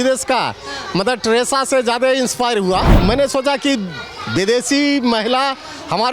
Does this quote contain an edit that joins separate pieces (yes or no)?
yes